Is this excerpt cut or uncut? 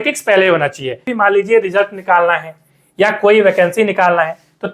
cut